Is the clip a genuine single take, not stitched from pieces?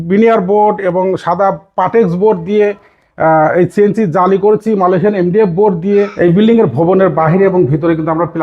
no; 1 cut; at 6.1 s

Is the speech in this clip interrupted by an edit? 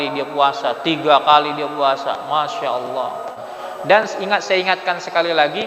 yes; 1 cut; at 3.5 s

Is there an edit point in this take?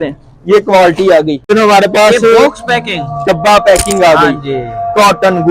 yes; 1 cut; at 1.4 s

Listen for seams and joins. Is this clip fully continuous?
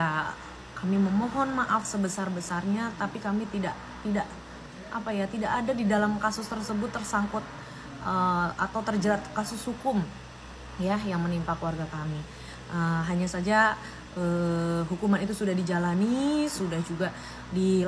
yes; 0 cuts

